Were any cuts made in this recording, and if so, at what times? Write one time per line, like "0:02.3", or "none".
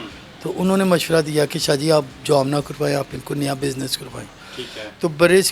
none